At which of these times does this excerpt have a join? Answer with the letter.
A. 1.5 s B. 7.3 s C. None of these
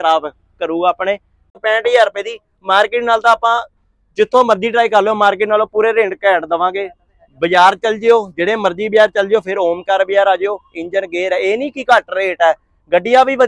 A